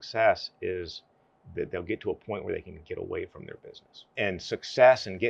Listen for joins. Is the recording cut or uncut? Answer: cut